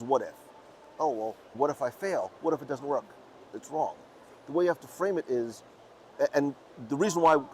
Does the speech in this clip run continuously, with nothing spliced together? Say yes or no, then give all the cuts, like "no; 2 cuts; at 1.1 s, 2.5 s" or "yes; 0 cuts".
no; 1 cut; at 0.9 s